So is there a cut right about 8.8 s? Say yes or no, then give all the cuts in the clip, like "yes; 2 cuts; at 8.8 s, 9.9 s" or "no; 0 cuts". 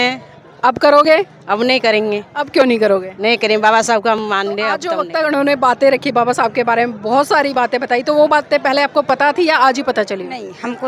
no; 1 cut; at 4.8 s